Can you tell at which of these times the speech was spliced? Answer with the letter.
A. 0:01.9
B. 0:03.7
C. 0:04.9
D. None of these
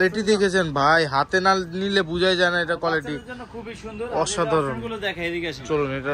D